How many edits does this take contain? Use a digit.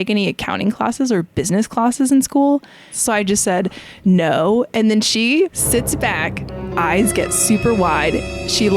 2